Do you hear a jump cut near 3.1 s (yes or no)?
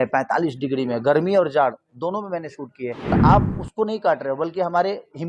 yes